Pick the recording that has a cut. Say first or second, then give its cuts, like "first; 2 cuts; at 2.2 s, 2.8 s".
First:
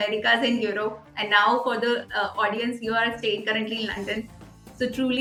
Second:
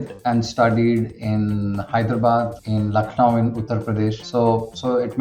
second; 2 cuts; at 2.6 s, 4.2 s